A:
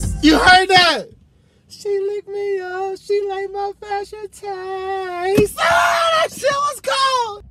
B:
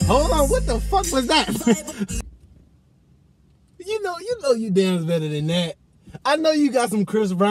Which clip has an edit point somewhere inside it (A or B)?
B